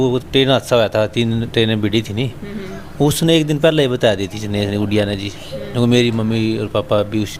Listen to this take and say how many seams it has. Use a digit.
0